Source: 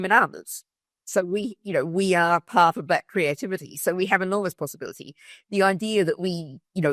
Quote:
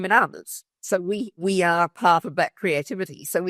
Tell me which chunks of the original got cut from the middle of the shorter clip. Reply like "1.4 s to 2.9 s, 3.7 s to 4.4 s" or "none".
1.2 s to 1.7 s